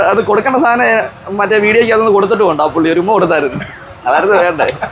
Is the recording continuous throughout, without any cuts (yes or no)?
yes